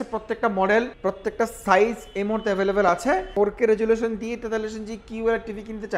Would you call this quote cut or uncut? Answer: cut